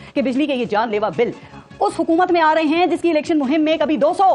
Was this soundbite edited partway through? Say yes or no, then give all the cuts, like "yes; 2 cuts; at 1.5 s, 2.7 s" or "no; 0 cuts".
no; 0 cuts